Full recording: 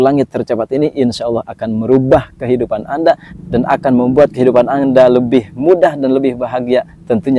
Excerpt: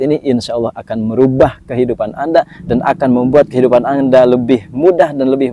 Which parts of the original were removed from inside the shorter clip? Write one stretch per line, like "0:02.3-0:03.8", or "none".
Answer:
0:03.3-0:03.4